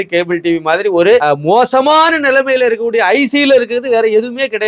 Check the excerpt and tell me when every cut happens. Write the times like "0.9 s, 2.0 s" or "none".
1.2 s